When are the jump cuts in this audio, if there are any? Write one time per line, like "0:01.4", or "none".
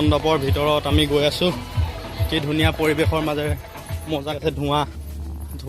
0:04.4